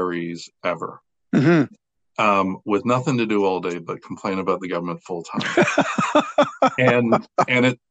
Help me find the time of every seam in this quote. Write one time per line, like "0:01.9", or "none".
none